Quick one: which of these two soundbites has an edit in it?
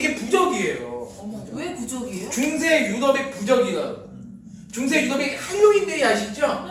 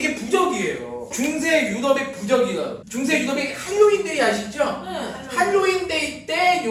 second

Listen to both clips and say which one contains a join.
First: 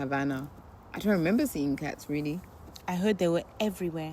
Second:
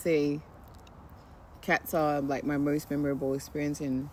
first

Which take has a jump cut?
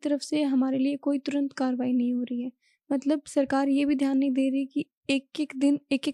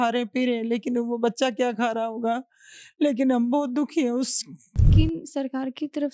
second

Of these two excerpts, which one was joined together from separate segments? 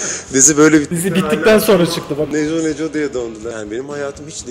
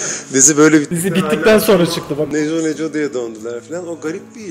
first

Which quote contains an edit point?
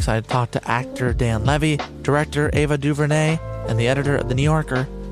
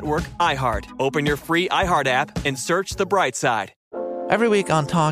second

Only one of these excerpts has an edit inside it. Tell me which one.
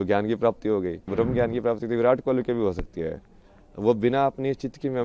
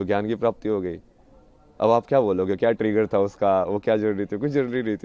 first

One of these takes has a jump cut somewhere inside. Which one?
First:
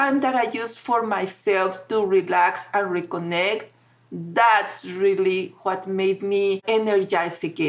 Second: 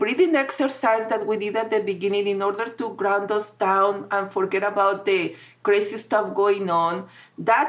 first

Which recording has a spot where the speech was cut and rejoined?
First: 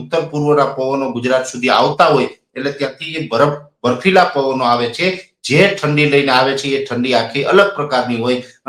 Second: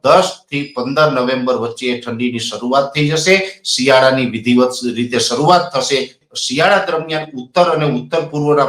second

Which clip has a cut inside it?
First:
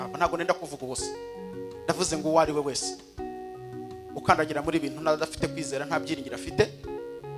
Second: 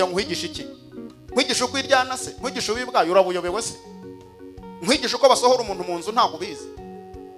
first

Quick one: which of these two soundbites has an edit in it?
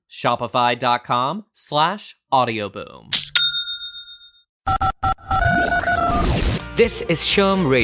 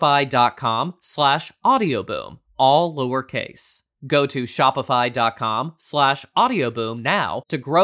first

